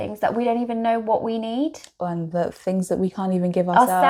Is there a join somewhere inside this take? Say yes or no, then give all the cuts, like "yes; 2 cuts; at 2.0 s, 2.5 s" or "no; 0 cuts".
no; 0 cuts